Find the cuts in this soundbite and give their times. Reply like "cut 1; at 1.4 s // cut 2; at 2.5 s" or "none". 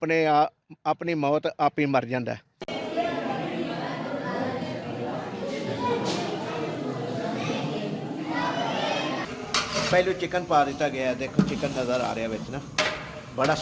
cut 1; at 2.6 s // cut 2; at 9.3 s